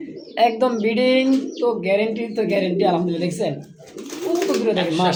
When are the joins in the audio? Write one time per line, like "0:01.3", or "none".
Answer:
none